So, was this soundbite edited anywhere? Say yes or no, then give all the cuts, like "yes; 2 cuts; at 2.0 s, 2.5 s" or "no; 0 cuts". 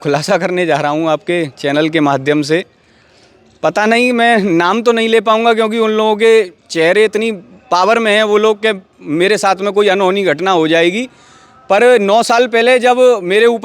no; 0 cuts